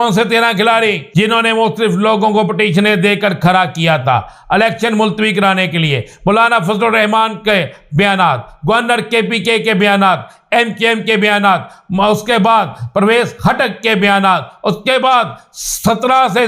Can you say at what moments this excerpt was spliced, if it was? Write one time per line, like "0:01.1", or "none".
0:01.0